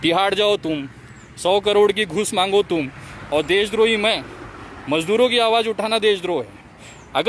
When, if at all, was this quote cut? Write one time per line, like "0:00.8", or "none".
none